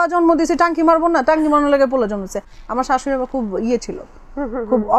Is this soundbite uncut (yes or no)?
yes